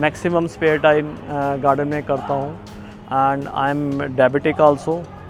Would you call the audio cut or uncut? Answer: uncut